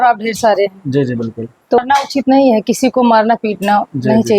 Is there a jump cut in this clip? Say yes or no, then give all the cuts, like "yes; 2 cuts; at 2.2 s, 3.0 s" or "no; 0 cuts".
yes; 1 cut; at 1.8 s